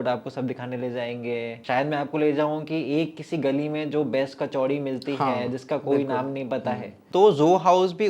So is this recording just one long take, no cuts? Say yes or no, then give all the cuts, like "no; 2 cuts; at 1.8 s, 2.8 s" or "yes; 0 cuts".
no; 2 cuts; at 1.6 s, 6.9 s